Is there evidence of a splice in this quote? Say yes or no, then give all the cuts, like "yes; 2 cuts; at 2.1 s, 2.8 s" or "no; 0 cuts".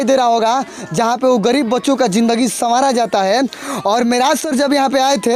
no; 0 cuts